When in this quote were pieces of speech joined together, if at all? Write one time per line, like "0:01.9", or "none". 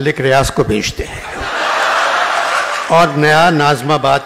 0:02.8